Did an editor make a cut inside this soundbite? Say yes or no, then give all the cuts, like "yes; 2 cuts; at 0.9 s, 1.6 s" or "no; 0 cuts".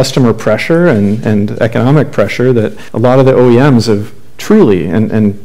yes; 1 cut; at 2.8 s